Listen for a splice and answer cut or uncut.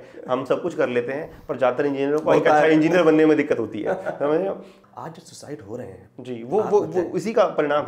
cut